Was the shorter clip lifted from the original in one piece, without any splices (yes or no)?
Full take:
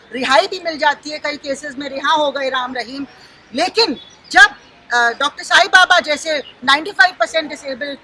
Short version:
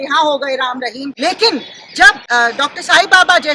no